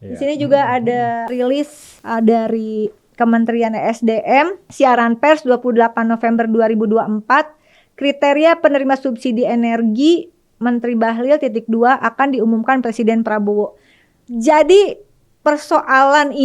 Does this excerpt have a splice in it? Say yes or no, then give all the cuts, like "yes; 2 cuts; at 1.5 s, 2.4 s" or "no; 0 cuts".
yes; 2 cuts; at 1.3 s, 4.6 s